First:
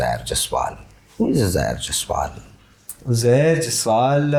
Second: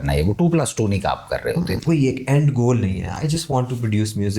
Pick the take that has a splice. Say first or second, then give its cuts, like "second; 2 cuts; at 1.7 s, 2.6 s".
second; 1 cut; at 1.8 s